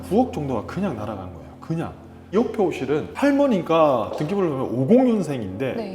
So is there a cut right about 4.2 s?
no; 1 cut; at 2.3 s

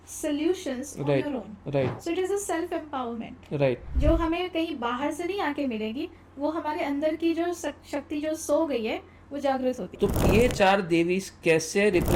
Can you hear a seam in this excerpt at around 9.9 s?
yes; 2 cuts; at 3.9 s, 9.9 s

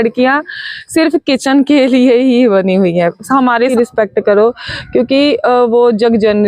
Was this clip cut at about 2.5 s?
no; 1 cut; at 3.7 s

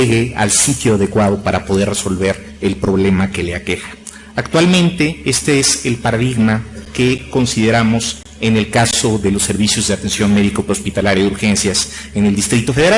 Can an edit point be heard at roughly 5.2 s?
no; 1 cut; at 11.3 s

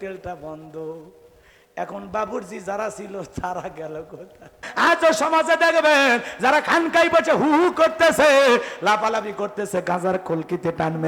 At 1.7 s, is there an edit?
no; 1 cut; at 4.7 s

